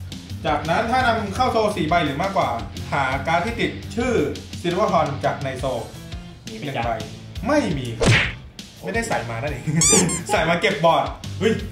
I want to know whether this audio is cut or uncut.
uncut